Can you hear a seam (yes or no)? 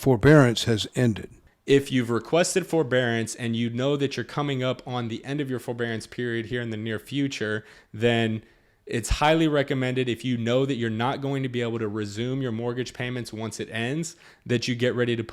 yes